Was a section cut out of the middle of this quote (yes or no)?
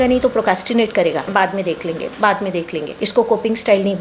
yes